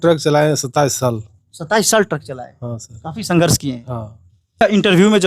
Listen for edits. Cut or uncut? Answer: cut